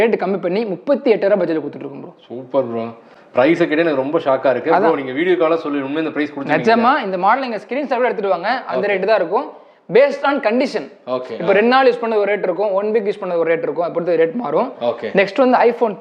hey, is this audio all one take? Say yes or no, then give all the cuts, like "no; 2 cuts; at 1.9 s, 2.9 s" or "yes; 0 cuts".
yes; 0 cuts